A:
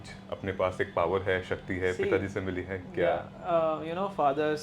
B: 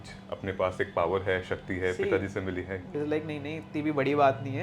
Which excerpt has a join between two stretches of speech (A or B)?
B